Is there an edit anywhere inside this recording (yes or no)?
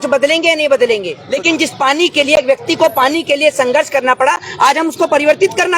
yes